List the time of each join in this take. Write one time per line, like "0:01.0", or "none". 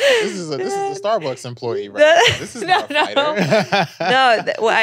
none